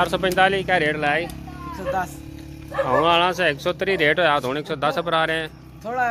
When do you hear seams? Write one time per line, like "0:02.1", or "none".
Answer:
none